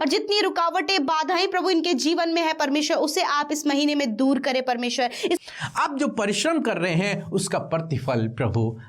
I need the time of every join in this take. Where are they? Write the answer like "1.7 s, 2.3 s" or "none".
5.4 s

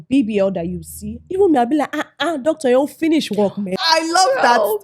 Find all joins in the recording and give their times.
3.8 s

